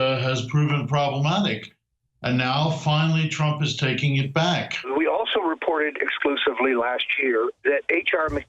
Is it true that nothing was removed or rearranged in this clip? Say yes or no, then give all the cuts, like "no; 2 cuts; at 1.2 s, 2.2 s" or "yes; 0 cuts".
no; 1 cut; at 4.9 s